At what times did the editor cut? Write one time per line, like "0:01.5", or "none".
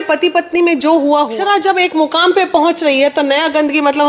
0:01.3